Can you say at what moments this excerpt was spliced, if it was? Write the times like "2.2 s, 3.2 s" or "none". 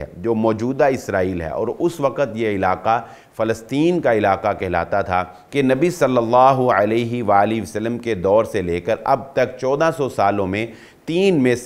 5.4 s